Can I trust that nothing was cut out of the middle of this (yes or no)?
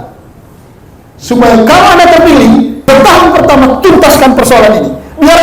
no